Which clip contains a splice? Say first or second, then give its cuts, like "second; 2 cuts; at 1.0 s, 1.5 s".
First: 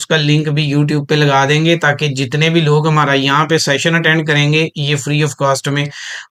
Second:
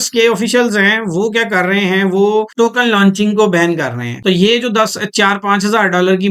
second; 2 cuts; at 2.5 s, 4.0 s